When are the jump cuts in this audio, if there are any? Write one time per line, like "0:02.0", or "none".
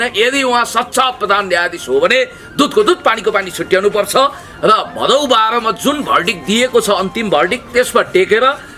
none